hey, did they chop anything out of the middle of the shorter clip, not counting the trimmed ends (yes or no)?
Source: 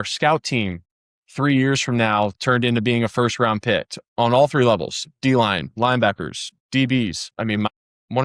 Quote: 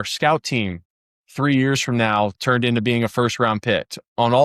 no